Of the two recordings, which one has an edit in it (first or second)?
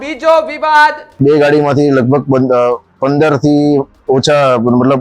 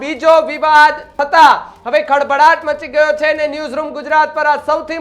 first